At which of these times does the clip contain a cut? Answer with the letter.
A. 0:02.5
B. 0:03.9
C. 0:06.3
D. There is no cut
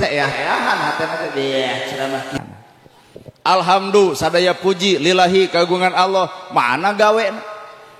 A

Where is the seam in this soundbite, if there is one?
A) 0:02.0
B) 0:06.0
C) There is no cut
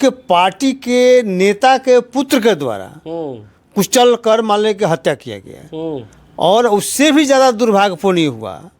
C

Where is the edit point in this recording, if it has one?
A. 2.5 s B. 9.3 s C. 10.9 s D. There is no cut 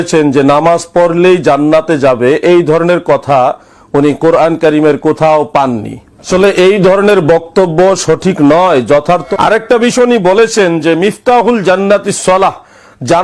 B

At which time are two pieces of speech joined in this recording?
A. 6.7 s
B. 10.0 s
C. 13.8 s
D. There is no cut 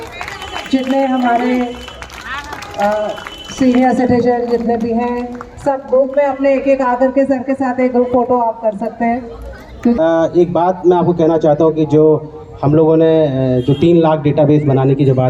B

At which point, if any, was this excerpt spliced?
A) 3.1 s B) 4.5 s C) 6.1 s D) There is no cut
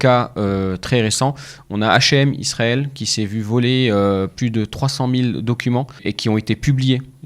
C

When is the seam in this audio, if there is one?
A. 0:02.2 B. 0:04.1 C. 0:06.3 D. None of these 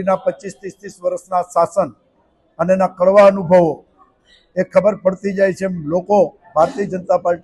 D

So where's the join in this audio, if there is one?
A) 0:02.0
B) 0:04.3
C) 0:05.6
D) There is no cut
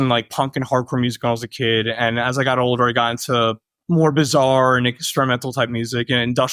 D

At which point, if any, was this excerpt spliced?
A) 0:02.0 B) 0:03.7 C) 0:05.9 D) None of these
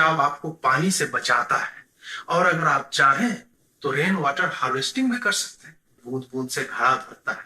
C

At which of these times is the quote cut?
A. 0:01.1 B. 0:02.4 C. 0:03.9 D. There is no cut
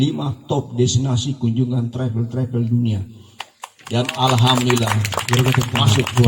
D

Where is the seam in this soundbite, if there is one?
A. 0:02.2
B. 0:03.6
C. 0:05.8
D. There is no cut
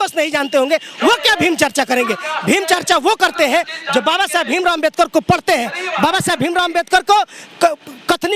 D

